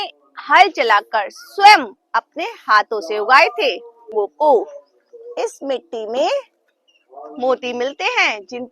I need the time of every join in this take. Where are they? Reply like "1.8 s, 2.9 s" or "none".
4.1 s